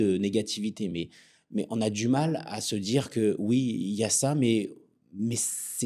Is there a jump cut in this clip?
no; 0 cuts

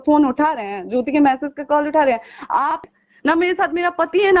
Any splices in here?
yes; 1 cut; at 2.8 s

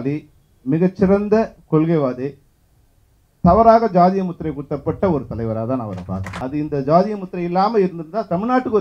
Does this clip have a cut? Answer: yes; 1 cut; at 6.3 s

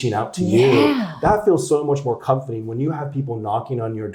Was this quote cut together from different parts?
no; 0 cuts

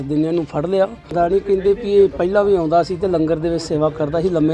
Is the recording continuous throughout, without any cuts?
no; 1 cut; at 1.1 s

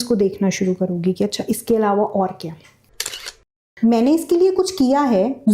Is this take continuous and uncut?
no; 1 cut; at 3.1 s

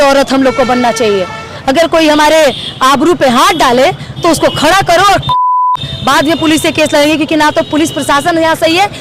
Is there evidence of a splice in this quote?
no; 0 cuts

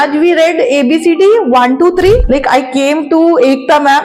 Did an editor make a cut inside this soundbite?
yes; 1 cut; at 2.2 s

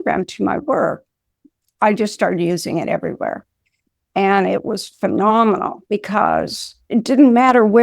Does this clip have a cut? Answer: no; 0 cuts

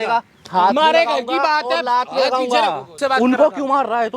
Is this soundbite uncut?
no; 1 cut; at 2.9 s

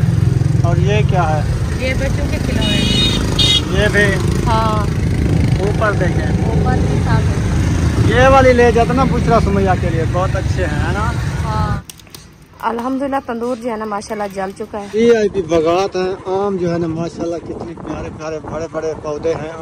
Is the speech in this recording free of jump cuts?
no; 2 cuts; at 11.8 s, 15.0 s

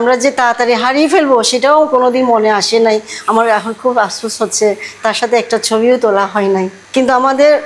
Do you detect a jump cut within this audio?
no; 0 cuts

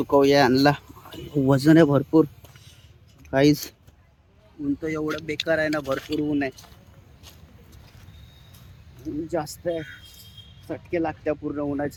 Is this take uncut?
yes; 0 cuts

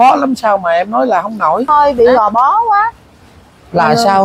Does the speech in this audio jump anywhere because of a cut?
yes; 1 cut; at 1.6 s

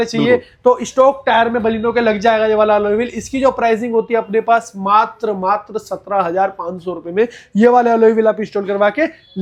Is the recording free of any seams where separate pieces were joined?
yes; 0 cuts

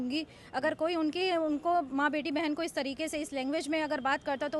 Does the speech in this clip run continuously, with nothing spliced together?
yes; 0 cuts

